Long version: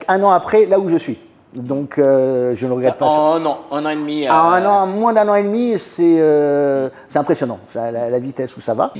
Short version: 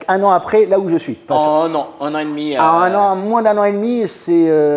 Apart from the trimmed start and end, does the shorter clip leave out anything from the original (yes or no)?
yes